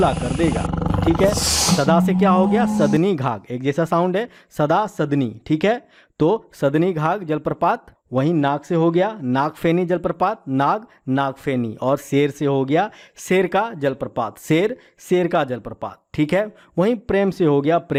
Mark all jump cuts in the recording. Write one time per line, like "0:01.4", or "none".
none